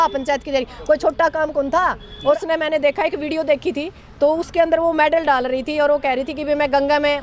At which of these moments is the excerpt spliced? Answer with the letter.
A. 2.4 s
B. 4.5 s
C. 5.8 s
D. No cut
A